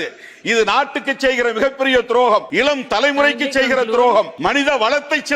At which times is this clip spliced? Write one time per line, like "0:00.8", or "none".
0:02.5
0:04.3